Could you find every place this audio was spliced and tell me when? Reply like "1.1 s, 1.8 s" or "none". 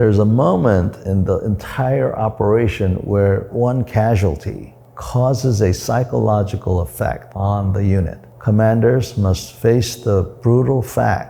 1.0 s, 3.5 s, 7.3 s, 8.2 s, 9.5 s